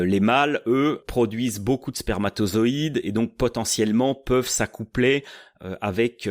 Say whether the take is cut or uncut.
cut